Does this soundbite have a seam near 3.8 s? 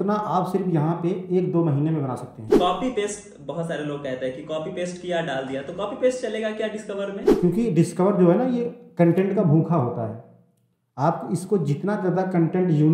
no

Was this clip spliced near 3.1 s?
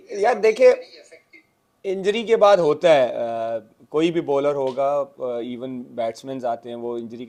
no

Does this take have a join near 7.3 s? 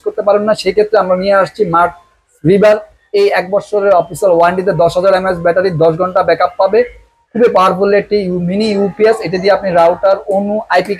no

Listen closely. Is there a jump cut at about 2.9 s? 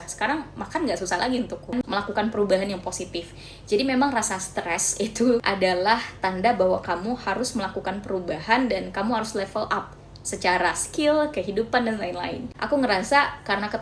no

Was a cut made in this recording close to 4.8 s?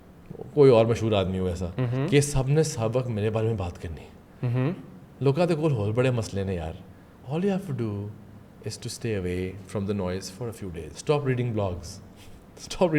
no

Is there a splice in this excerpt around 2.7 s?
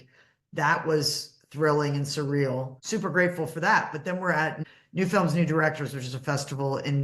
yes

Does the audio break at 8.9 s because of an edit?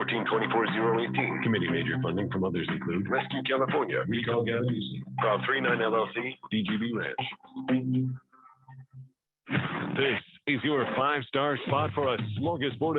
yes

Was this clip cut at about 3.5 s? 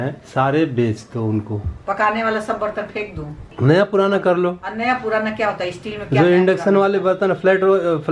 yes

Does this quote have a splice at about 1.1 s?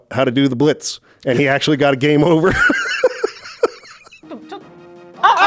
no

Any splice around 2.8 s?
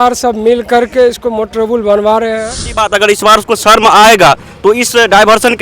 yes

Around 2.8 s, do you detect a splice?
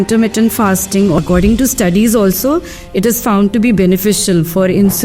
no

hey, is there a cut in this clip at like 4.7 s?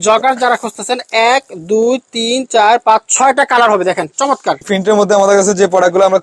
yes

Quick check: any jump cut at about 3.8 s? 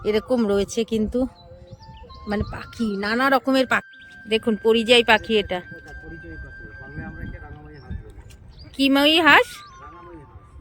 yes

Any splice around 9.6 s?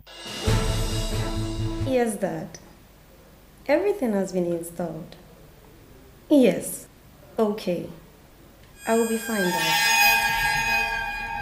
no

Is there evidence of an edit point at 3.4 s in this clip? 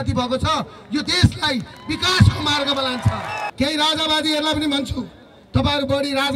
yes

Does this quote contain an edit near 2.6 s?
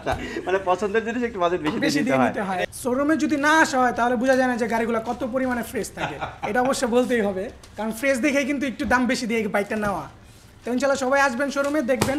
yes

